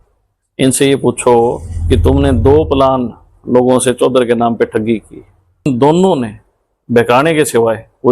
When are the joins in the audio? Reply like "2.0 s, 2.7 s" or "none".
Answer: 5.7 s